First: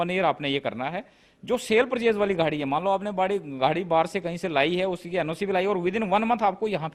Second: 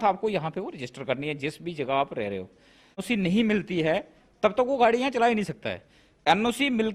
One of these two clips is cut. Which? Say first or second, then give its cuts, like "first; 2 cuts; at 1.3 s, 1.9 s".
second; 1 cut; at 3.0 s